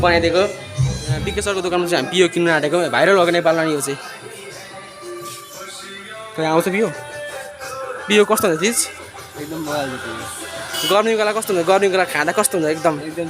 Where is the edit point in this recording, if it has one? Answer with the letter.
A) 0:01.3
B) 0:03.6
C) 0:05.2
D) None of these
A